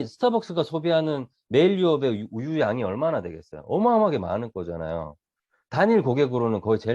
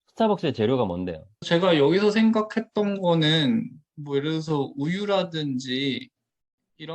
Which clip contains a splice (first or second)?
second